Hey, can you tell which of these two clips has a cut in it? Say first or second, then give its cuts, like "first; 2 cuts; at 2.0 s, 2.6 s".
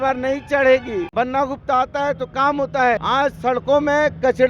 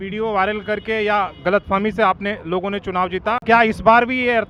first; 2 cuts; at 1.1 s, 3.0 s